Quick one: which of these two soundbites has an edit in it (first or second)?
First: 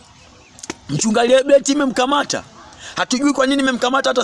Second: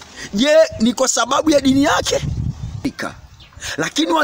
second